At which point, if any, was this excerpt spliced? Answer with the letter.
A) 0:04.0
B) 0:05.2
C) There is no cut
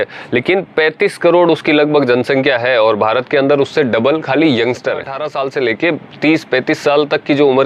B